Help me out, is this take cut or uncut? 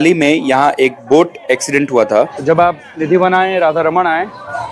cut